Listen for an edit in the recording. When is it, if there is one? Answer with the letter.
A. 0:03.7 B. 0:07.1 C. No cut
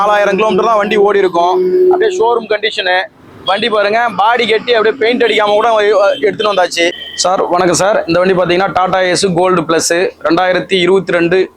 B